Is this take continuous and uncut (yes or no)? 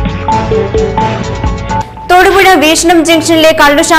yes